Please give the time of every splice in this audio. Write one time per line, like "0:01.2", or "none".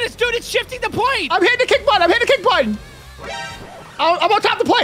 0:02.9